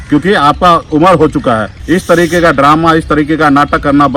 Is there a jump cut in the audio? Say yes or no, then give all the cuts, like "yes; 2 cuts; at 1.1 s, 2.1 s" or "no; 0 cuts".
yes; 1 cut; at 1.7 s